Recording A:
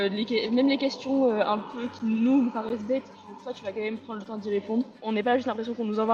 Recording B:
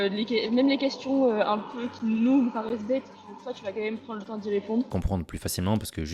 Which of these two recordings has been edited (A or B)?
B